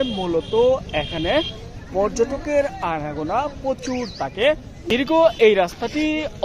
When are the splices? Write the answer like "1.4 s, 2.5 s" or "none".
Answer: 4.9 s